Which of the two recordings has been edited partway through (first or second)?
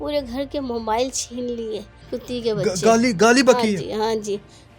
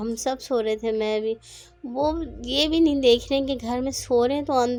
first